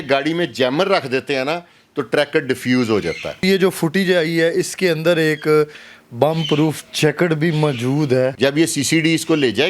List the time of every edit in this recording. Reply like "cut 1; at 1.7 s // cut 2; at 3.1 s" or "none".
cut 1; at 3.4 s // cut 2; at 8.3 s